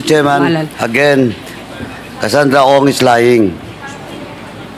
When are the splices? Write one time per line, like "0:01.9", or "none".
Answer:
none